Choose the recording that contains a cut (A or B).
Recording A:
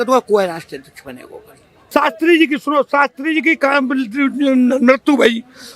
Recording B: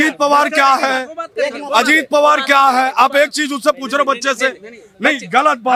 A